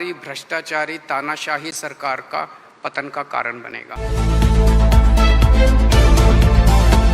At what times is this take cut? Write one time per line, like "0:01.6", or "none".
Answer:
0:03.8